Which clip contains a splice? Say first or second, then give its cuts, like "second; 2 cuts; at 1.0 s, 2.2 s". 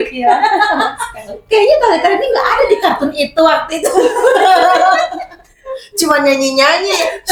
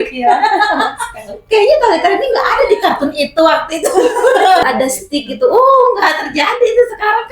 second; 1 cut; at 4.6 s